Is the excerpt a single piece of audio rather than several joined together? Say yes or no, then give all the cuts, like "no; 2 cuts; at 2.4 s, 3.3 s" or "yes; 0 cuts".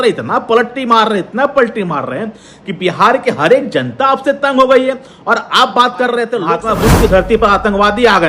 no; 1 cut; at 6.5 s